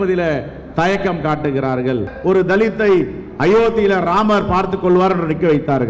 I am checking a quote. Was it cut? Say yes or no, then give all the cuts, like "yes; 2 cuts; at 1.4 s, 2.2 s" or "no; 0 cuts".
yes; 1 cut; at 2.1 s